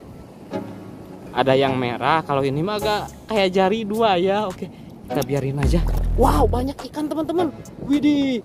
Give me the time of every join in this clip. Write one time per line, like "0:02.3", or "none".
0:05.9